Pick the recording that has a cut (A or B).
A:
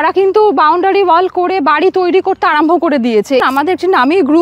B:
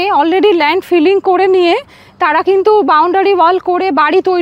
A